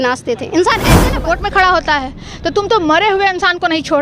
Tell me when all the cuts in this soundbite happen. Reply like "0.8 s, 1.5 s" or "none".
1.0 s